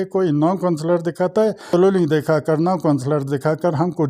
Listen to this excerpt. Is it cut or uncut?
cut